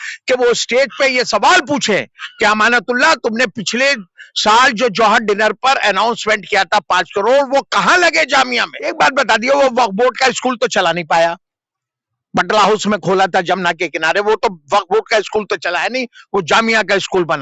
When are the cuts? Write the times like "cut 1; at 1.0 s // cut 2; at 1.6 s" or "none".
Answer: cut 1; at 8.8 s